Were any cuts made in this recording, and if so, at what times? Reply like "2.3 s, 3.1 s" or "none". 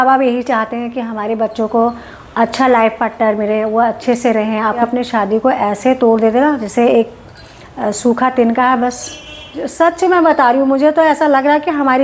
4.8 s, 9.6 s